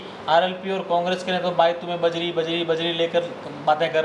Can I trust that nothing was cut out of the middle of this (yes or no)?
yes